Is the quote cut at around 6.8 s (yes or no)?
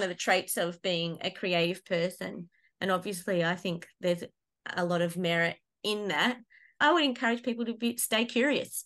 yes